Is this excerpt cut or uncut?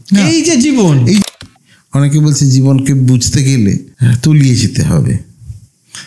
cut